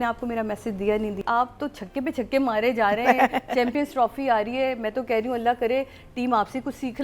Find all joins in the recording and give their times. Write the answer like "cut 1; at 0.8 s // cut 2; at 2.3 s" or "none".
cut 1; at 1.2 s